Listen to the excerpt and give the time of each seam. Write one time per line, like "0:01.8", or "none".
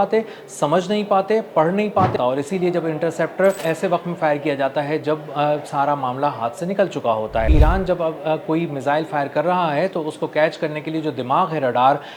0:02.1
0:03.6
0:07.5